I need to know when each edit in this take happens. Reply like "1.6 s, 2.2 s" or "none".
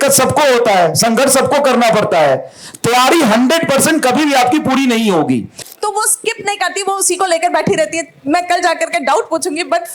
5.6 s